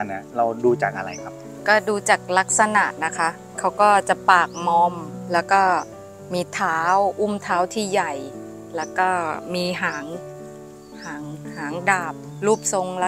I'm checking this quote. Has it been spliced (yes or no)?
no